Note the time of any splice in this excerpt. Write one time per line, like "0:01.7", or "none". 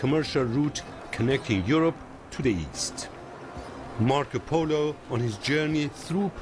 0:02.0